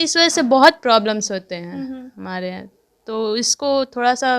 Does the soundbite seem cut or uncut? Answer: uncut